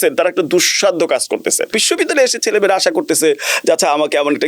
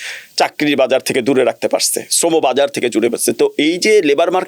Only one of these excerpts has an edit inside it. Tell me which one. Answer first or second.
first